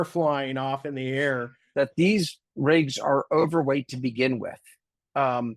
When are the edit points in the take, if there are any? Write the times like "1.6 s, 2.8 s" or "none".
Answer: 1.6 s